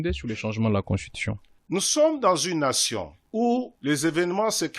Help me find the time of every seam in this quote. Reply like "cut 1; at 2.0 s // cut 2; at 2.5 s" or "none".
cut 1; at 1.5 s // cut 2; at 3.2 s // cut 3; at 3.7 s